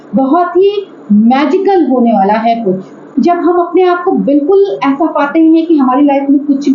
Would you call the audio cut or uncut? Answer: cut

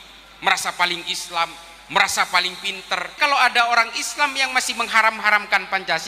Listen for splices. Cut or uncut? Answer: cut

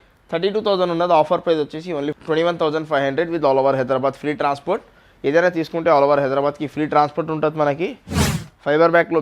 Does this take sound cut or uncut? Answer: uncut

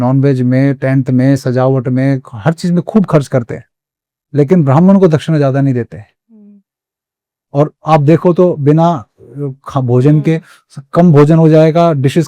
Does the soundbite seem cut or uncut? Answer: uncut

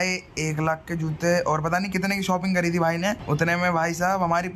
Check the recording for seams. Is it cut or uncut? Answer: uncut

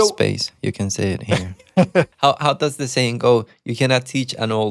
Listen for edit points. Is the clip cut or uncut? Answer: cut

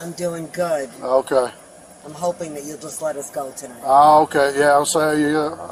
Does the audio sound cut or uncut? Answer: uncut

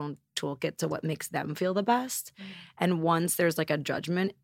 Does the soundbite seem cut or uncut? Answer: uncut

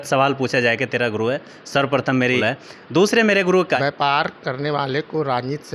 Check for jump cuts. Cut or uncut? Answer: cut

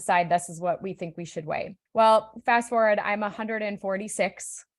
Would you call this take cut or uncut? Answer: cut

